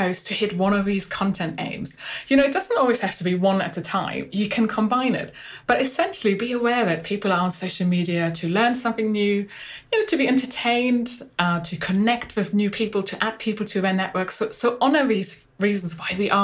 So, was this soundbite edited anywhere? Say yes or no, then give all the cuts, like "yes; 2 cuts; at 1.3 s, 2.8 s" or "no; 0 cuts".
no; 0 cuts